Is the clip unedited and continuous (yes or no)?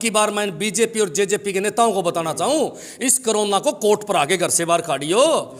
yes